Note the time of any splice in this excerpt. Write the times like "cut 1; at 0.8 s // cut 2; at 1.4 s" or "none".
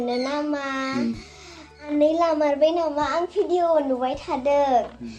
cut 1; at 1.9 s

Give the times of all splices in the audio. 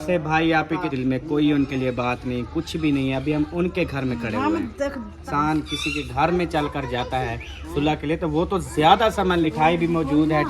cut 1; at 0.9 s // cut 2; at 5.3 s // cut 3; at 9.4 s

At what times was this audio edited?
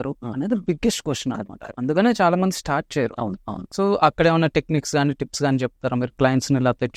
none

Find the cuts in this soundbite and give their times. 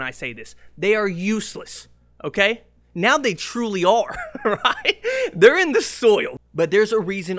cut 1; at 6.3 s

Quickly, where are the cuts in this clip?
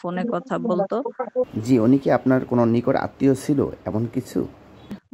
cut 1; at 1.5 s

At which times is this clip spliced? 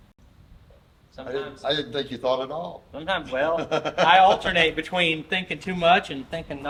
none

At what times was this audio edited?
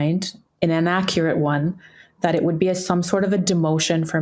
none

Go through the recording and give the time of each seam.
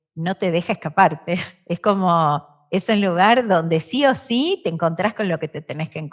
cut 1; at 1.5 s

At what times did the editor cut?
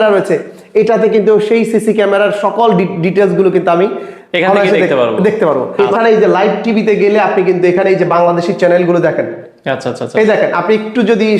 cut 1; at 5.7 s

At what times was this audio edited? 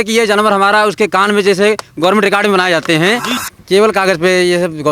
cut 1; at 3.4 s

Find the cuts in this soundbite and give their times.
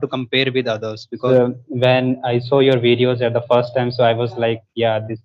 cut 1; at 1.2 s

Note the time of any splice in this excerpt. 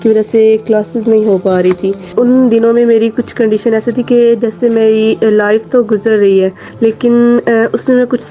cut 1; at 2.0 s // cut 2; at 6.6 s

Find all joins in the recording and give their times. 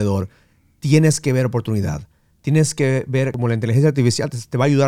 cut 1; at 3.3 s

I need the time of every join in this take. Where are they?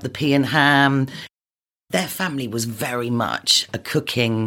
cut 1; at 1.4 s

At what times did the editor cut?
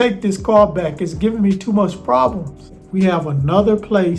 cut 1; at 2.8 s

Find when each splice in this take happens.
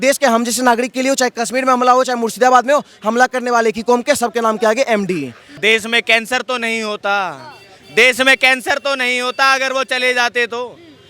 cut 1; at 5.5 s

